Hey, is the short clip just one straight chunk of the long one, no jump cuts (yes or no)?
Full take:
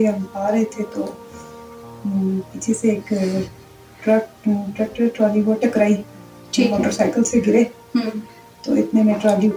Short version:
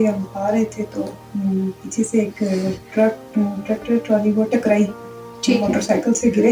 no